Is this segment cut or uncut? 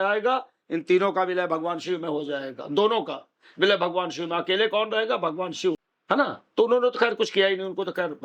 cut